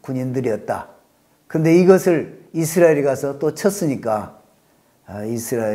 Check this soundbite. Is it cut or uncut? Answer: uncut